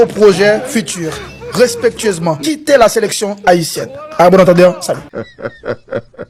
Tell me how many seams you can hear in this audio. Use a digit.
0